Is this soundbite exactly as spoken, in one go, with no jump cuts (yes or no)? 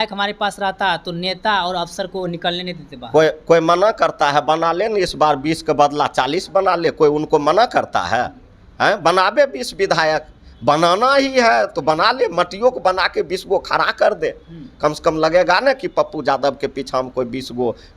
yes